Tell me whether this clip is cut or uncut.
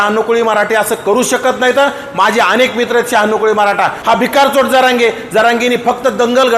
cut